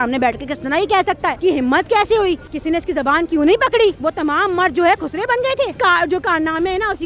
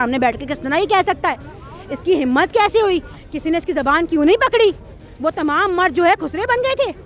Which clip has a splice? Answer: first; 4 cuts; at 1.4 s, 2.5 s, 4.0 s, 5.8 s

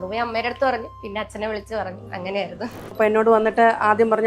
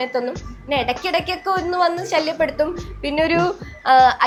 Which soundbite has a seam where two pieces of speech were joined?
first; 1 cut; at 3.0 s

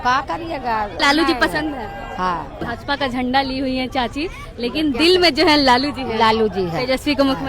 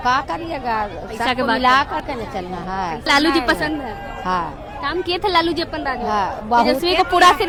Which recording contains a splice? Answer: first; 2 cuts; at 0.9 s, 2.7 s

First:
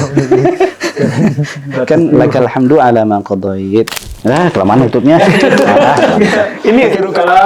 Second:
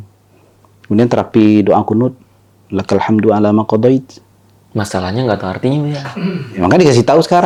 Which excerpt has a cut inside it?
first; 1 cut; at 4.1 s

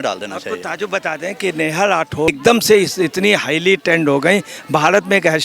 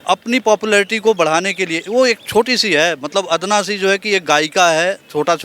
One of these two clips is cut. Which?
first; 1 cut; at 2.3 s

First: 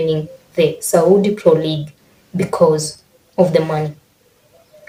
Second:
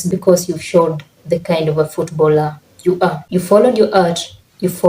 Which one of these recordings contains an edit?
second; 1 cut; at 3.2 s

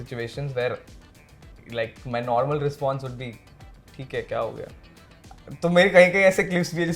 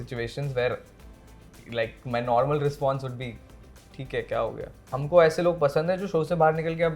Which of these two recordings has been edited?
second; 1 cut; at 5.0 s

